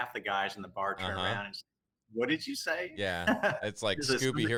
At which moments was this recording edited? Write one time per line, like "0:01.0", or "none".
none

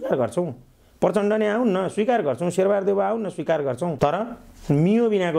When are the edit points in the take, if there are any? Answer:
0:03.9

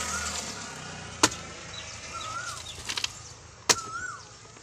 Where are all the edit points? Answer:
none

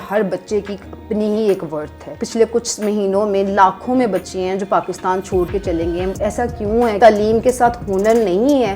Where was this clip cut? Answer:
0:02.2
0:07.0

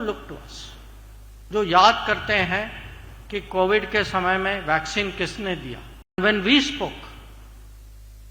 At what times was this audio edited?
0:06.2

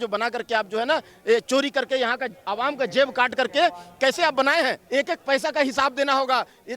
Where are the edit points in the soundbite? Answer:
0:04.8

